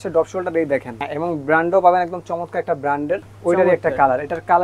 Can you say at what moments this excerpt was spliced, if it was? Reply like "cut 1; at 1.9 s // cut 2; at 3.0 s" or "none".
cut 1; at 1.0 s // cut 2; at 3.3 s